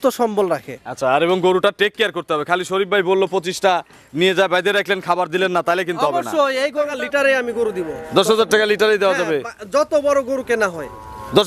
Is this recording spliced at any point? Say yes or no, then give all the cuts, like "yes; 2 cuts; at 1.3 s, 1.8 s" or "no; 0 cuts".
yes; 1 cut; at 6.9 s